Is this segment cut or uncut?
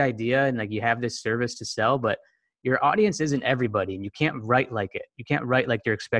uncut